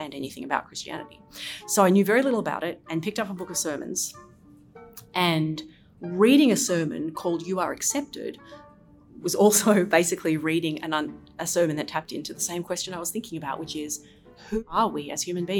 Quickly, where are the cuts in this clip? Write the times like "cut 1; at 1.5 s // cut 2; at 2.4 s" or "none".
cut 1; at 14.6 s

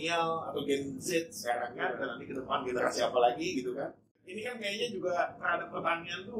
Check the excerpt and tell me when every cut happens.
none

